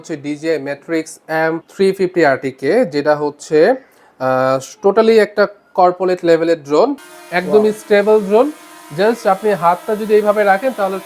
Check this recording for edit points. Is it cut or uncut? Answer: cut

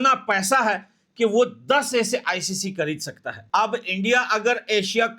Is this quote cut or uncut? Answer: cut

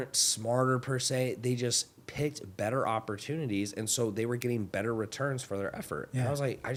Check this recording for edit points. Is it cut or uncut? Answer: uncut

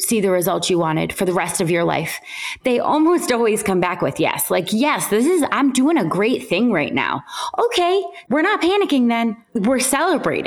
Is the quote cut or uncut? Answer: cut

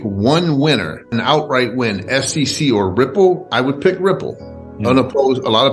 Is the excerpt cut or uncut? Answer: cut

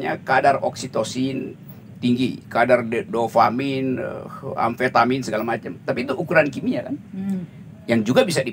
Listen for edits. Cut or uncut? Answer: uncut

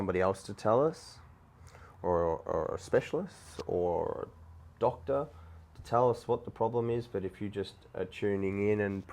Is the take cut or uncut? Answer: uncut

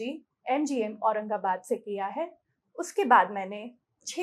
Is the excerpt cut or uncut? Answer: uncut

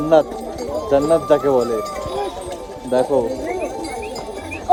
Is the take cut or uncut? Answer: uncut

